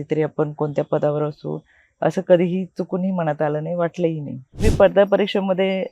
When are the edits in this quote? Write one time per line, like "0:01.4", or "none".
0:04.6